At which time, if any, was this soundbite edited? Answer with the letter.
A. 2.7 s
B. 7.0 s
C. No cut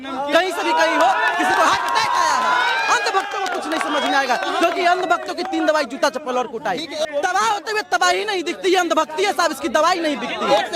B